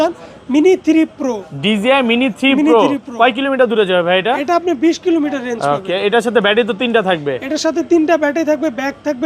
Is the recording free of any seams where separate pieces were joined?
yes; 0 cuts

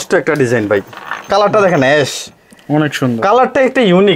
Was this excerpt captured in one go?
yes; 0 cuts

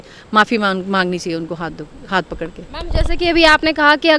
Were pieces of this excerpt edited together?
no; 0 cuts

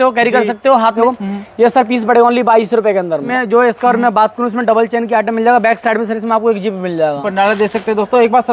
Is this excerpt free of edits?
no; 3 cuts; at 1.0 s, 3.3 s, 7.2 s

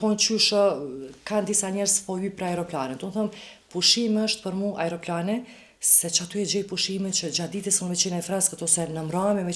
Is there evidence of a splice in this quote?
no; 0 cuts

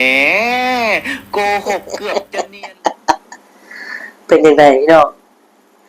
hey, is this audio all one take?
no; 1 cut; at 2.0 s

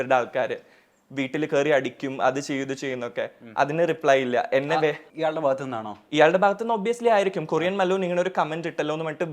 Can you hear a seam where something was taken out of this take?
no; 0 cuts

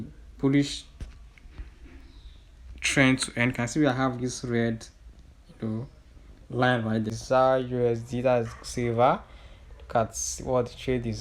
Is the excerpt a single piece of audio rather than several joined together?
no; 1 cut; at 7.2 s

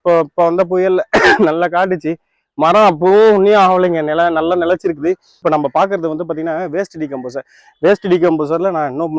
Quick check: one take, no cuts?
no; 1 cut; at 5.3 s

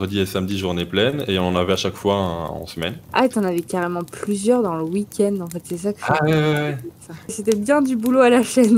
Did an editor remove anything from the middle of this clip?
yes; 2 cuts; at 3.0 s, 7.4 s

